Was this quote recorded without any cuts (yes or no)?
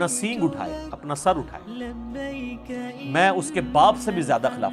yes